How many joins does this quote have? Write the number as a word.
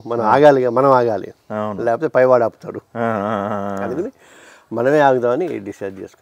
zero